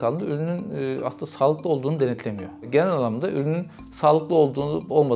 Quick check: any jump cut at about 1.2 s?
no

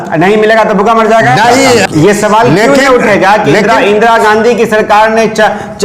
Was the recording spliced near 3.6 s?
no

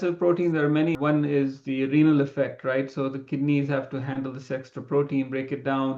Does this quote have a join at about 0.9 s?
yes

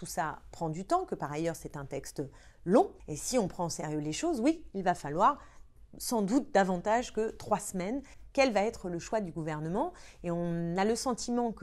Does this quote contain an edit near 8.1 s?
yes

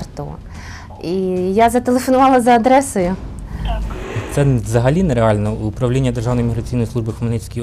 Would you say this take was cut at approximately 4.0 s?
yes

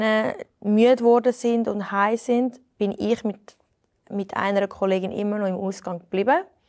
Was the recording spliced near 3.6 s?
no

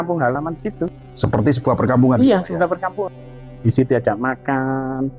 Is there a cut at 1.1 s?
yes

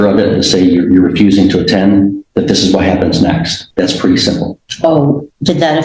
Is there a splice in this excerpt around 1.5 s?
no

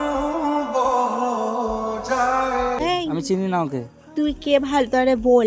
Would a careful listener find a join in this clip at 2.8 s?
yes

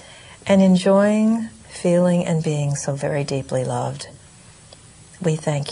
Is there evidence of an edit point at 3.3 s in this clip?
yes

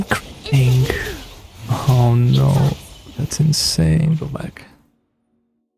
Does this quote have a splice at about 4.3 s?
yes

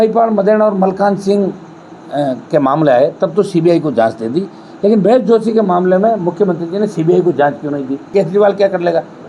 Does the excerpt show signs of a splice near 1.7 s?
no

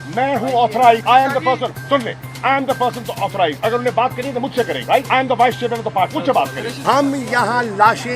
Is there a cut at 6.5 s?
yes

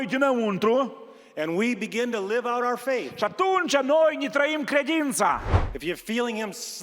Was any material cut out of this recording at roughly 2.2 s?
no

